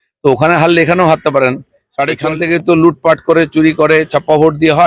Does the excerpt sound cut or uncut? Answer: cut